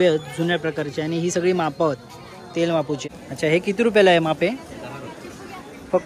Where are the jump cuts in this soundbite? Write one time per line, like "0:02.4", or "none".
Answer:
0:03.0